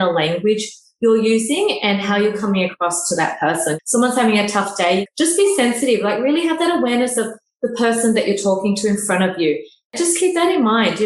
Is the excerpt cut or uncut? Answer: cut